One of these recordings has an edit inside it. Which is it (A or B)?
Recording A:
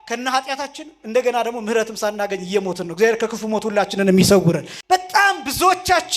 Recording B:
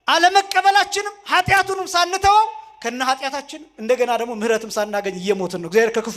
A